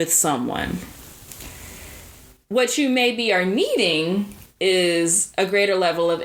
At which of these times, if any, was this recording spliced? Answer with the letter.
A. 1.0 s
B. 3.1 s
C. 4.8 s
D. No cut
D